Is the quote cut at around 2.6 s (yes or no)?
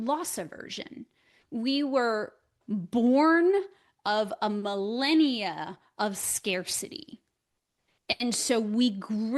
yes